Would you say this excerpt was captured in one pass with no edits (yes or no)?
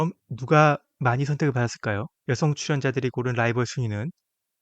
no